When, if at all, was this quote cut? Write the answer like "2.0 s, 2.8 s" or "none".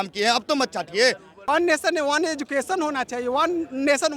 1.4 s

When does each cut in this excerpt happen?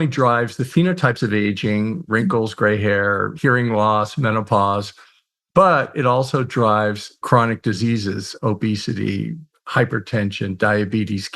3.3 s, 7.2 s

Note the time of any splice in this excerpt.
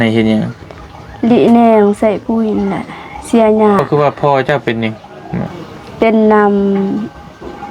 3.9 s, 5.6 s

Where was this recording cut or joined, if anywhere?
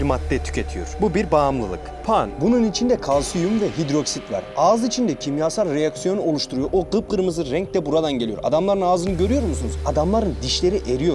none

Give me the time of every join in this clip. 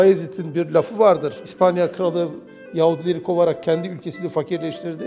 1.4 s

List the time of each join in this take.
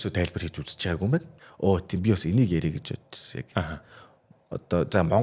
1.4 s

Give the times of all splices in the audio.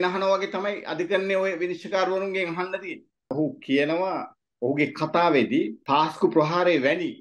3.3 s, 5.8 s

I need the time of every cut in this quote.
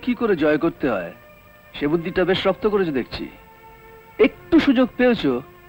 none

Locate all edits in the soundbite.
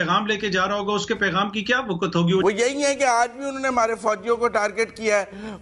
2.4 s

